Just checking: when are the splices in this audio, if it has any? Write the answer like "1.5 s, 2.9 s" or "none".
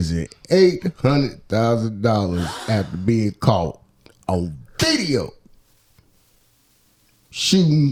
none